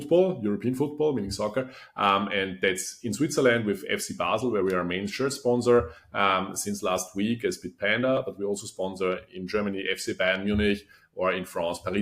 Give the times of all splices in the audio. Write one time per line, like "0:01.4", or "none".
none